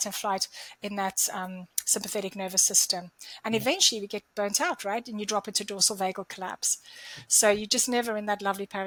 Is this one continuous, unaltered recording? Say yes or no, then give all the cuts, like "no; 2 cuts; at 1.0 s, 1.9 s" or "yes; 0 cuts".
yes; 0 cuts